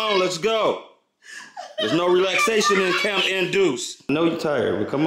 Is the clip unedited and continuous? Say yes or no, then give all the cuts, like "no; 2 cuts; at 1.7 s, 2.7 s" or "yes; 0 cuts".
no; 1 cut; at 4.1 s